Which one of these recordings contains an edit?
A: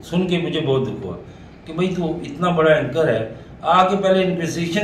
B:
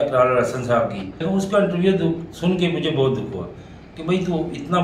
B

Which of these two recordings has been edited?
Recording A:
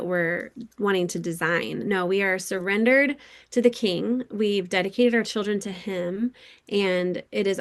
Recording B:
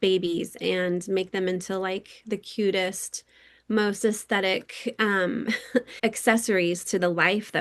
B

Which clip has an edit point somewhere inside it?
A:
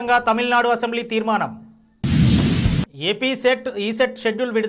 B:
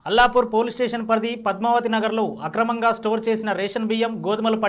A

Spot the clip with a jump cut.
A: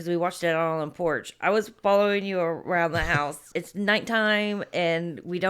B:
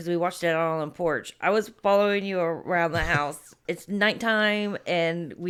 A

